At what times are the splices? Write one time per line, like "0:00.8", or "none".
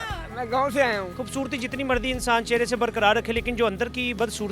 0:01.1